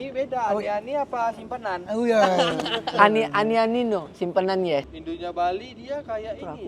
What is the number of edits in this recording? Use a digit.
1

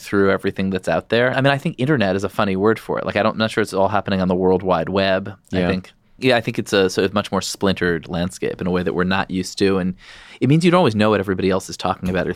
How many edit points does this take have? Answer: 2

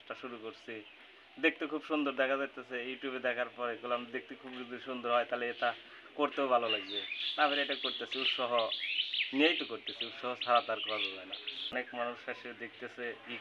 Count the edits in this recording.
1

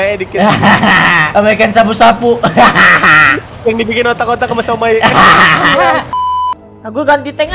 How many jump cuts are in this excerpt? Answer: 2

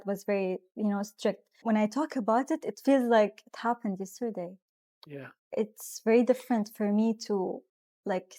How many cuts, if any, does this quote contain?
1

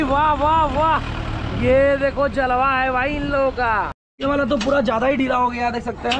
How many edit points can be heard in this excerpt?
1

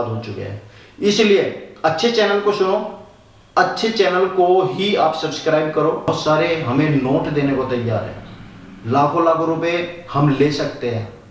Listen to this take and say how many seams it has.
1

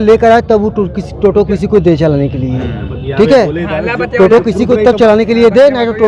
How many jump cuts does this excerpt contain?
0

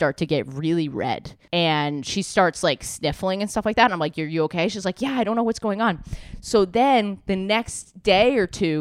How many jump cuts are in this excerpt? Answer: 1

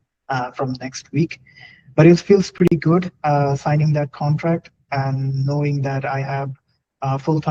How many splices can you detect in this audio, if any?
0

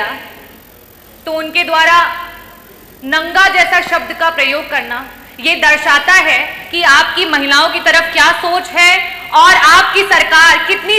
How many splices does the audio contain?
0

